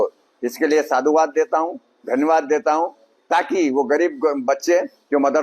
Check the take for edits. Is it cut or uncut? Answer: uncut